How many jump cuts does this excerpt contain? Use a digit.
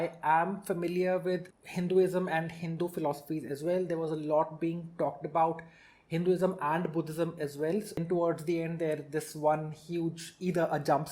1